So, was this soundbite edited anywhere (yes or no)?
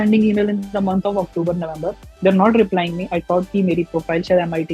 no